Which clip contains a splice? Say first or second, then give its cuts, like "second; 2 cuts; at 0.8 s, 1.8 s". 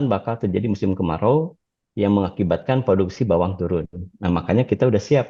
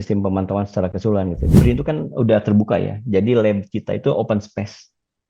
second; 1 cut; at 1.6 s